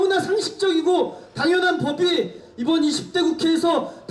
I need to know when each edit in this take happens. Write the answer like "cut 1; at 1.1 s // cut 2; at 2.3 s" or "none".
cut 1; at 2.4 s